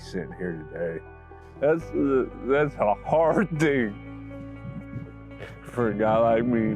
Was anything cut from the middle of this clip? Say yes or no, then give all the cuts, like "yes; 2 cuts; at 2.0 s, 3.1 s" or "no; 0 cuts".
yes; 1 cut; at 1.4 s